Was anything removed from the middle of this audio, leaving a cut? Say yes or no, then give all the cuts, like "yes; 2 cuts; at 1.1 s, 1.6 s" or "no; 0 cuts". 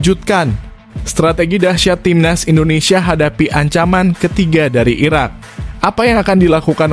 no; 0 cuts